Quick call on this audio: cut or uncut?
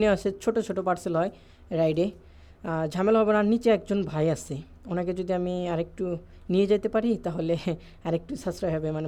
uncut